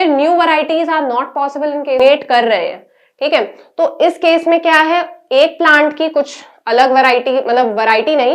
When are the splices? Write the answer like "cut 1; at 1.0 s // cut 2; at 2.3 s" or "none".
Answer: cut 1; at 2.0 s